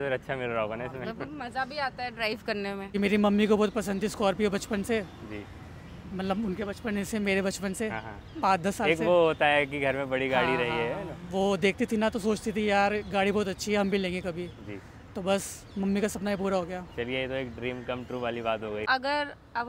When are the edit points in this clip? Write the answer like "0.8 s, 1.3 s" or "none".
2.9 s, 18.9 s